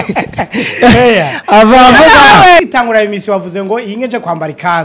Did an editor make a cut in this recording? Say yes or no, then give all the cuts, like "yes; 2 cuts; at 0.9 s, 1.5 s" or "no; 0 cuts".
yes; 1 cut; at 2.6 s